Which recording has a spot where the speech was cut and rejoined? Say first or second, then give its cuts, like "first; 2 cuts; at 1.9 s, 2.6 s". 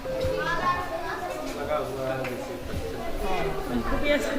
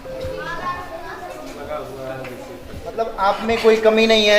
second; 1 cut; at 3.0 s